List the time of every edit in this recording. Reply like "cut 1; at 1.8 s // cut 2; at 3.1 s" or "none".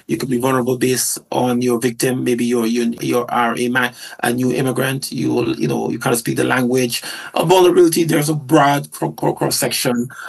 none